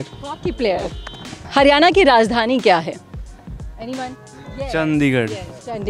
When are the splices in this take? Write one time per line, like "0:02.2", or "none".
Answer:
0:01.4
0:04.3